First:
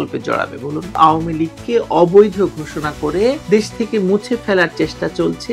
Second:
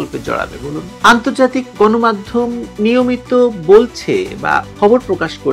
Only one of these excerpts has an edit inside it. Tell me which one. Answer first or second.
first